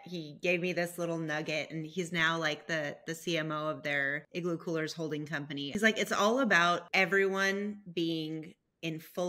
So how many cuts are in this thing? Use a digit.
3